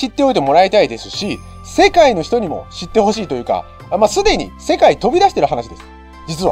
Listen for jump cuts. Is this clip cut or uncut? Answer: uncut